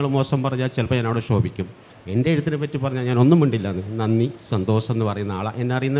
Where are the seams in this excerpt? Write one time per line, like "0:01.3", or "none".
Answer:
none